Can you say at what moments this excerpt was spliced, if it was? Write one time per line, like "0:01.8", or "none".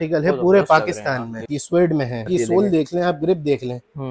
0:01.4
0:02.3

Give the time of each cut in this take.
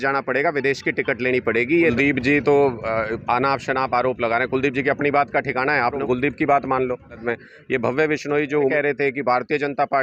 0:01.9
0:06.0
0:07.2
0:08.7

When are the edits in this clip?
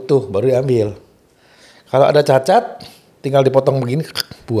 none

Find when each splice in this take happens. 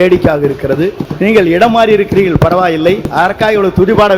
0:01.0
0:03.1

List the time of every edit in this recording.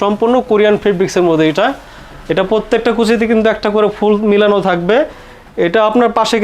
none

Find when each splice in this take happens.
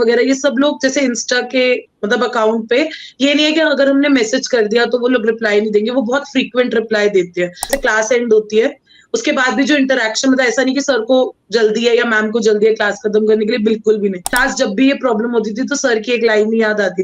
0:07.7
0:14.4

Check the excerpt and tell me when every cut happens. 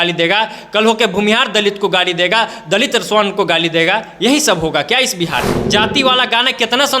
0:05.6

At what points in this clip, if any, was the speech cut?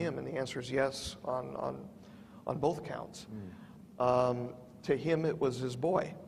0:02.6

